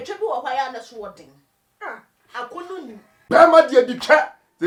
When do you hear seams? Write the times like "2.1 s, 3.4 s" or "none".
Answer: none